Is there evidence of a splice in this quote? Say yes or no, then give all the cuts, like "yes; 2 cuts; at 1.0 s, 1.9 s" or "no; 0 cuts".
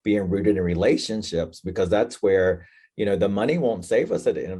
no; 0 cuts